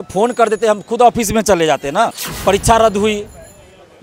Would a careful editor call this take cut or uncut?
cut